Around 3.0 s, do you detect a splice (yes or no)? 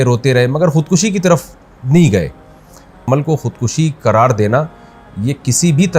yes